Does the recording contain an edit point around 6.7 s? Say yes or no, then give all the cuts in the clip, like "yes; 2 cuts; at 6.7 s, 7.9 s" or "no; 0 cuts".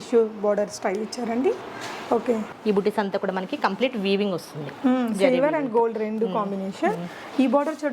no; 1 cut; at 2.5 s